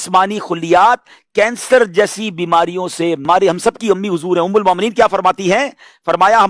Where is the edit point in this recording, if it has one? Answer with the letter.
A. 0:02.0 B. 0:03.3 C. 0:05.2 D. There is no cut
B